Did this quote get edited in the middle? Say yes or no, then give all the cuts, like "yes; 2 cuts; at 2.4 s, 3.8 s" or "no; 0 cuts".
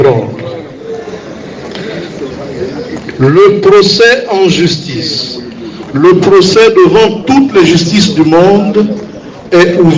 no; 0 cuts